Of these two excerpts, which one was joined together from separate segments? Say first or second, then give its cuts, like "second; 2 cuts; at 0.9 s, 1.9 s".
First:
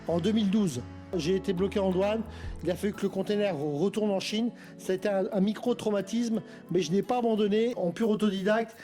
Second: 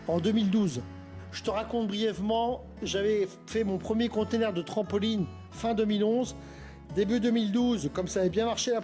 first; 2 cuts; at 1.1 s, 7.8 s